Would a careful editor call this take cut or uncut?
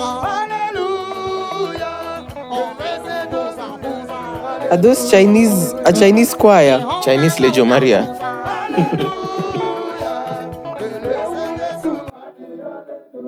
uncut